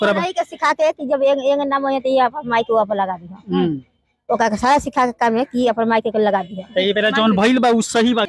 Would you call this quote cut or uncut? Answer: uncut